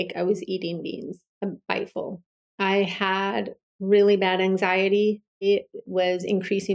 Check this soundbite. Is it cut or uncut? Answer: cut